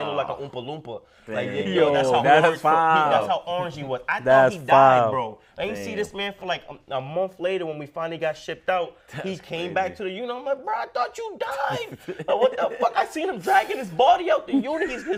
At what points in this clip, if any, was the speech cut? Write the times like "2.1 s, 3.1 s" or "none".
none